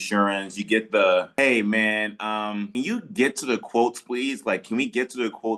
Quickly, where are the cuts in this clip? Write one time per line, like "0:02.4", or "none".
0:01.3
0:02.7